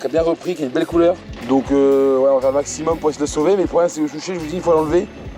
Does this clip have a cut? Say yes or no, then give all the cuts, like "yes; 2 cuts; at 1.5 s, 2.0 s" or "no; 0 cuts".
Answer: yes; 1 cut; at 1.3 s